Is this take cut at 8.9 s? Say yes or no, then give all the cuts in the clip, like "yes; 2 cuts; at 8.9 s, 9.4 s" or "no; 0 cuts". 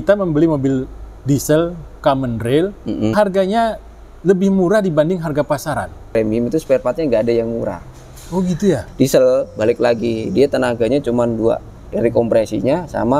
yes; 3 cuts; at 3.1 s, 6.1 s, 8.9 s